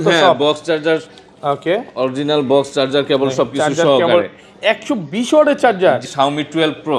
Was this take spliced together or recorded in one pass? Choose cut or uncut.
cut